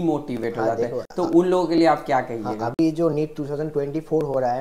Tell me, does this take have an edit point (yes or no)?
no